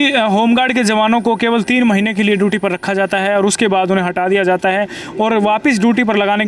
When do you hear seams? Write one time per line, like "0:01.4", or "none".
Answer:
none